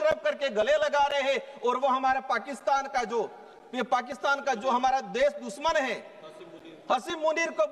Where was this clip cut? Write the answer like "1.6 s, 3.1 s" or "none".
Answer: none